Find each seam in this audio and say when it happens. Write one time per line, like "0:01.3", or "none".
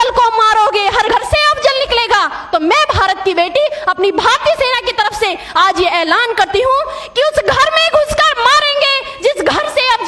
0:01.1